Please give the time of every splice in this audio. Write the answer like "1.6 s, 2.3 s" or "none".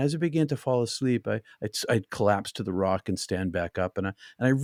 none